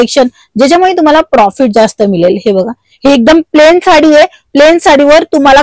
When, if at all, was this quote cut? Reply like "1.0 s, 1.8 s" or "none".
none

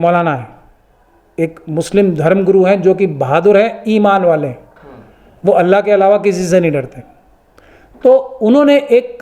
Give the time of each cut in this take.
none

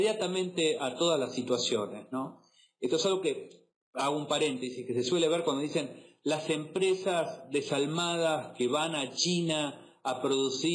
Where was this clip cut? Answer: 1.3 s

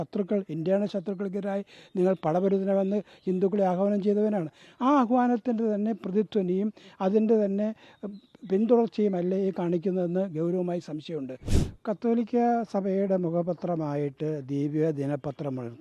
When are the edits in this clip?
11.3 s

